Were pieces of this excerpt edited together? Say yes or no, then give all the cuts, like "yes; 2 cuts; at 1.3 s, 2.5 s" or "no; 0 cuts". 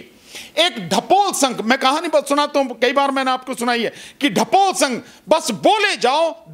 no; 0 cuts